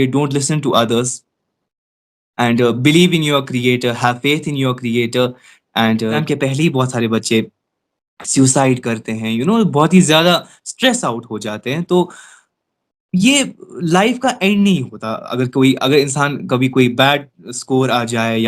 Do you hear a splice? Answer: yes; 1 cut; at 6.2 s

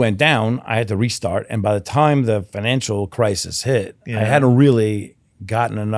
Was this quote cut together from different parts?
yes; 1 cut; at 2.5 s

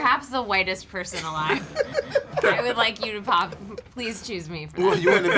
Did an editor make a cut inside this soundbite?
no; 0 cuts

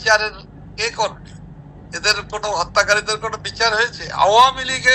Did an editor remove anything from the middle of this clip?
no; 0 cuts

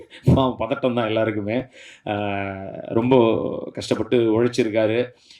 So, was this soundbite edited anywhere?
no; 0 cuts

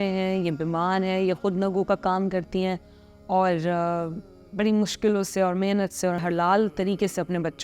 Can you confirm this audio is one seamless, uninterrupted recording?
no; 1 cut; at 6.2 s

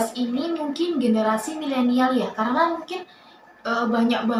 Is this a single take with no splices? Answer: yes; 0 cuts

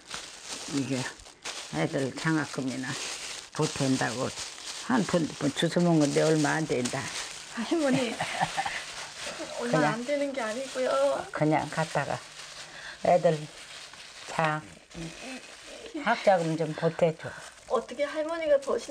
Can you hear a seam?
no; 0 cuts

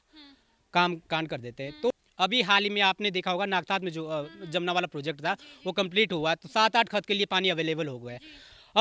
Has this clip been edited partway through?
yes; 1 cut; at 1.9 s

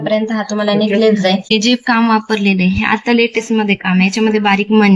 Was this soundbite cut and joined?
yes; 1 cut; at 1.5 s

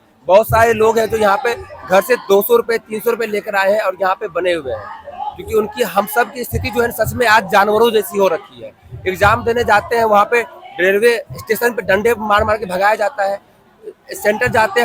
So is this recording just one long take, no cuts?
yes; 0 cuts

